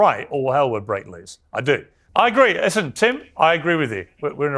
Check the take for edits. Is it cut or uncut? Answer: cut